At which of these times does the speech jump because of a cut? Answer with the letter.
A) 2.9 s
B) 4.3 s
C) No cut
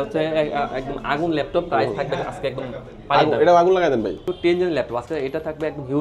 B